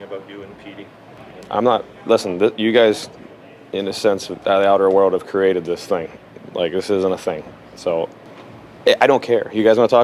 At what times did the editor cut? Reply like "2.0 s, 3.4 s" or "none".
1.1 s, 8.3 s